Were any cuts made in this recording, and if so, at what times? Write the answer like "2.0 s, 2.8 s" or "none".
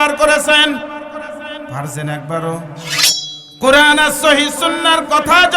3.1 s